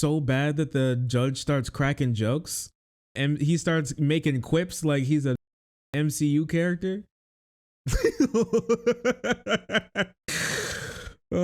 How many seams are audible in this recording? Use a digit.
1